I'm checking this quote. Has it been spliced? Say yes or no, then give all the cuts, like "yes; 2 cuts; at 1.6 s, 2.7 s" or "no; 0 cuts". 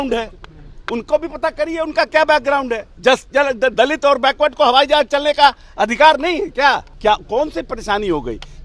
yes; 2 cuts; at 2.9 s, 6.9 s